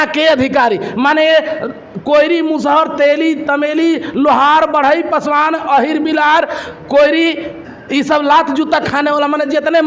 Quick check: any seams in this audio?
no; 0 cuts

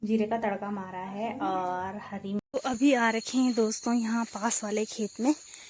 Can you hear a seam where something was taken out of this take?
yes; 1 cut; at 2.4 s

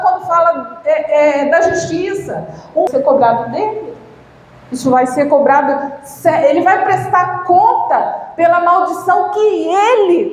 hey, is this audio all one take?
no; 1 cut; at 2.9 s

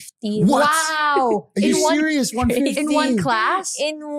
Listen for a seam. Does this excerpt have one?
no; 0 cuts

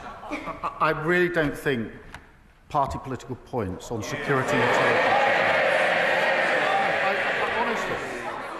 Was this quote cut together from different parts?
no; 0 cuts

